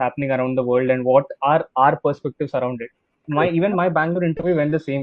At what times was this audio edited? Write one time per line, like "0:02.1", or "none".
0:03.2